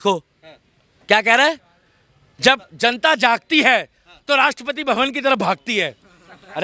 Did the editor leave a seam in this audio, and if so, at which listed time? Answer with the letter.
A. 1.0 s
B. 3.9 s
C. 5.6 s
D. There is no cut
D